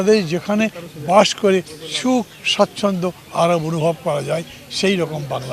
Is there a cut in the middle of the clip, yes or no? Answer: no